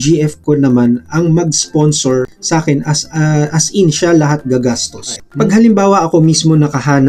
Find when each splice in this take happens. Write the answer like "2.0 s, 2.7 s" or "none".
5.2 s